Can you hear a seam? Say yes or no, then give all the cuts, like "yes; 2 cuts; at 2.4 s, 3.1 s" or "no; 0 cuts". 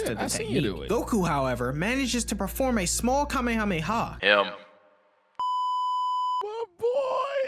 yes; 1 cut; at 4.1 s